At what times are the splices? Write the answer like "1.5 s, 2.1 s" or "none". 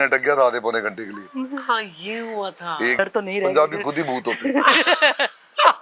3.0 s

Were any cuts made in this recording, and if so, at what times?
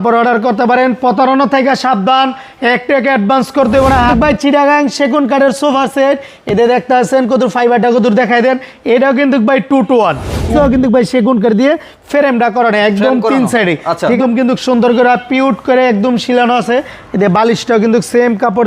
4.1 s, 10.5 s, 14.2 s

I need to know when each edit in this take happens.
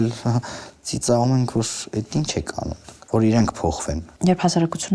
2.9 s, 4.0 s

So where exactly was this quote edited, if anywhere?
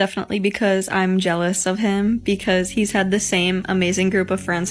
none

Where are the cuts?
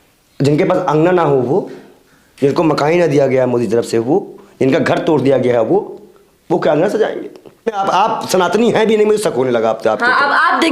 7.8 s

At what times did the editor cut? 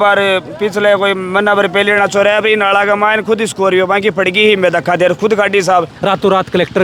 5.9 s

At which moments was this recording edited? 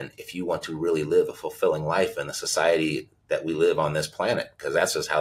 none

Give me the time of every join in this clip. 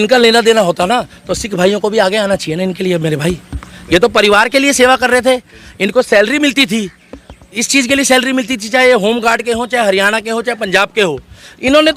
none

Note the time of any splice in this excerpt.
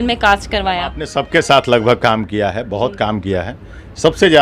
1.1 s

